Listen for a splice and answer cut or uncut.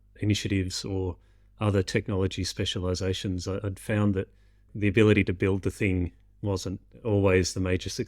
cut